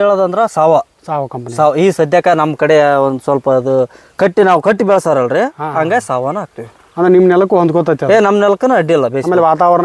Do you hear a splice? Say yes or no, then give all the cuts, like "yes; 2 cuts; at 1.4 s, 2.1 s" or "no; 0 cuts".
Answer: no; 0 cuts